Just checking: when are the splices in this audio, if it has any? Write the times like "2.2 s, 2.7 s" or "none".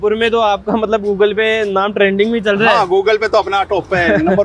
none

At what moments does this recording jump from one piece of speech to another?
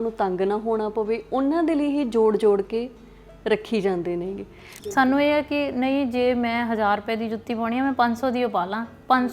4.8 s

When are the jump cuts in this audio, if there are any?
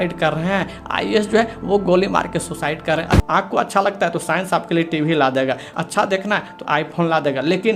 3.2 s, 5.7 s

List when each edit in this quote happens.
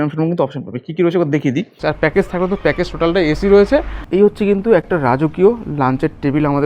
1.7 s, 4.0 s

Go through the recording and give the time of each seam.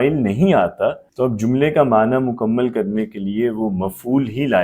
1.1 s

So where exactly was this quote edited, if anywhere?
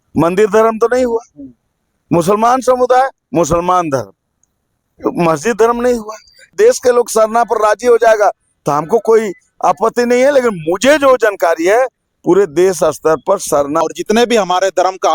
6.5 s, 13.8 s

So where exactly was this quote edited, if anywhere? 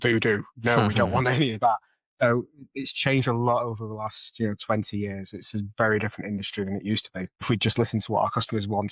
7.4 s

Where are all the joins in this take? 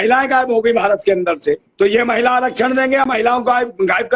1.7 s

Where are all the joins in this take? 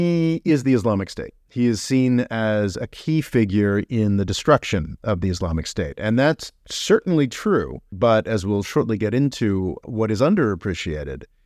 7.9 s, 9.8 s

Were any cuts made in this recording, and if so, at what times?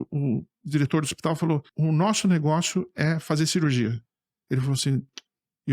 1.7 s

